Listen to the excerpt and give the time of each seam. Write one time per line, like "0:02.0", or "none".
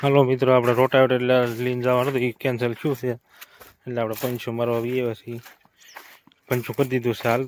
none